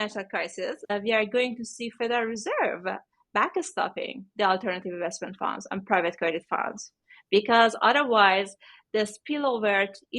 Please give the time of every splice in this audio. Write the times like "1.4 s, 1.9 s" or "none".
0.9 s